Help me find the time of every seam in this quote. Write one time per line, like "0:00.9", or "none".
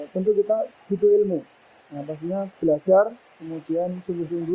none